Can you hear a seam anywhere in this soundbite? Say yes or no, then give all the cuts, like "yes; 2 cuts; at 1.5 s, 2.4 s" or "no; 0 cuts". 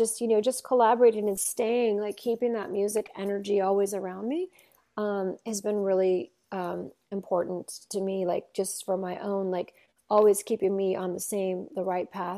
no; 0 cuts